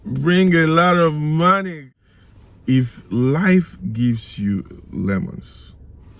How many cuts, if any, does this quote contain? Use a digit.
1